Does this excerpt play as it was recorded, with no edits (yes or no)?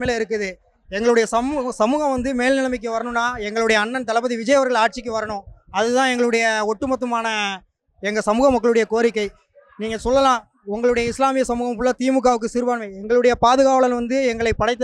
yes